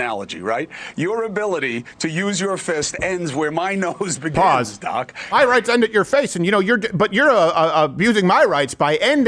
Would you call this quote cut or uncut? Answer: cut